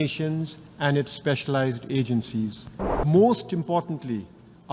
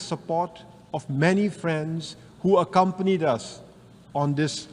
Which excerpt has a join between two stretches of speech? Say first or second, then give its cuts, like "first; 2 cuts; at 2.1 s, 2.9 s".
first; 1 cut; at 3.0 s